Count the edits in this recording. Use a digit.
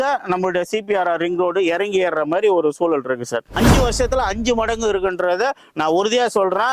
1